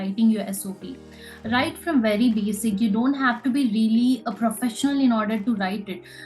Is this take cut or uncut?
uncut